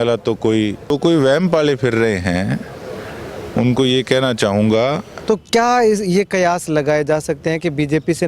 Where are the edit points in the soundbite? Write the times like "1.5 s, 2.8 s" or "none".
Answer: 0.9 s, 5.1 s